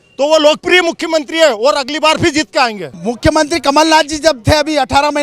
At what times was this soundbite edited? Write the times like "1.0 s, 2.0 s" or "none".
2.9 s